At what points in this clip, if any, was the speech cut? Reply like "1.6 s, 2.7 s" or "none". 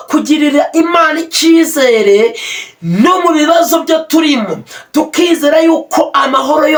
none

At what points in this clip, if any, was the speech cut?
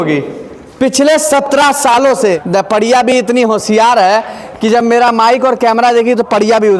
2.4 s

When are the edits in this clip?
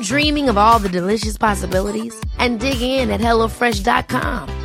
none

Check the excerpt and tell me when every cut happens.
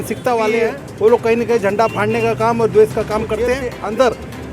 1.1 s, 3.5 s

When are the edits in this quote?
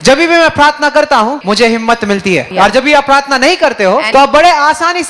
1.4 s, 2.5 s, 4.1 s

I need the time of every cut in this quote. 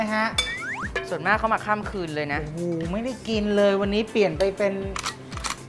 none

